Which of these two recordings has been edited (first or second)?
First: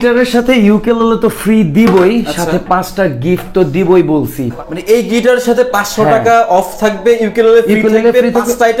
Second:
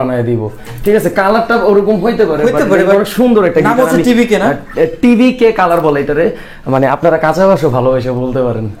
first